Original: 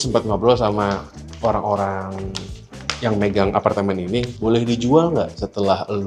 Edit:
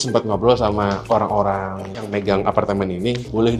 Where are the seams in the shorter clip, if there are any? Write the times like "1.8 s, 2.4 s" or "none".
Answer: 1.0 s, 2.1 s

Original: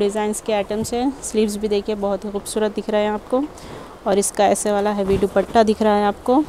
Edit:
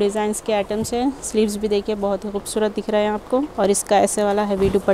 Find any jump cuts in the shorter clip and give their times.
3.5 s

